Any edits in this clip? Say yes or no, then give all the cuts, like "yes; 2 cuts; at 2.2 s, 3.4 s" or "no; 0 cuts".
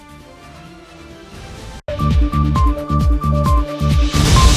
yes; 1 cut; at 1.7 s